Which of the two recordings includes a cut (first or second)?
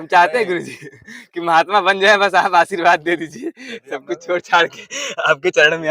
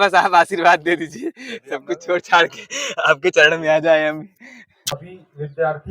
second